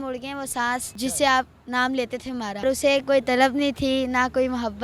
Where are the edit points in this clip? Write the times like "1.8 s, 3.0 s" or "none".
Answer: 0.9 s, 2.6 s

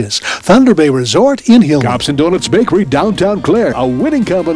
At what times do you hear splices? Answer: 2.0 s

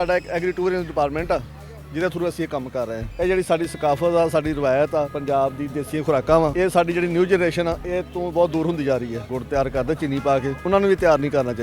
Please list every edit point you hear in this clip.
3.0 s, 9.3 s

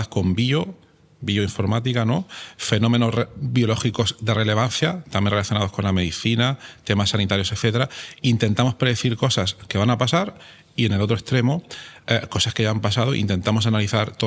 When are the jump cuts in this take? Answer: none

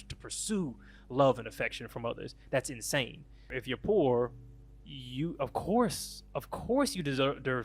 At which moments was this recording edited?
3.6 s

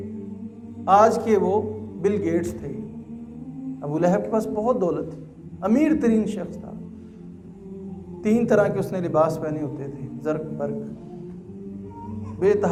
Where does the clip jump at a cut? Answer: none

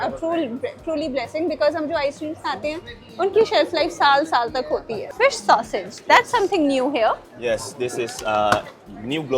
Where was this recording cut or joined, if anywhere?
5.0 s

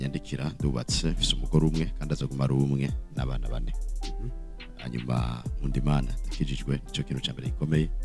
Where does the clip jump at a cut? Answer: none

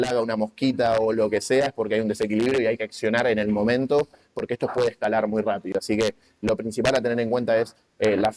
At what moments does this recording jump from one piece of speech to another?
none

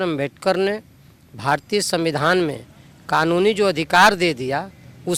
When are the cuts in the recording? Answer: none

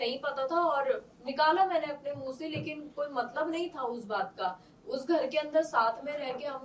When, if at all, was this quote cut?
none

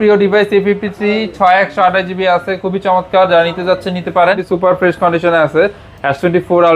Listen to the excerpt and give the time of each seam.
4.4 s

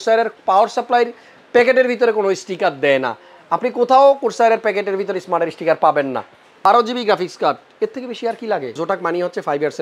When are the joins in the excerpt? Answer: 6.7 s, 8.8 s

